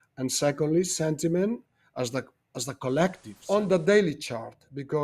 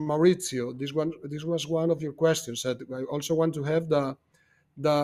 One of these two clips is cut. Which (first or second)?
first